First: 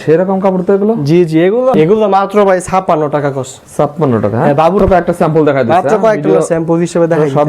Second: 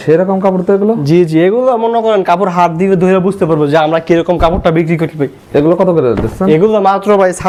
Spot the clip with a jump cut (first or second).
first